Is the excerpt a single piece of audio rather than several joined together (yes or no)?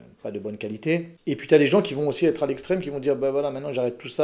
no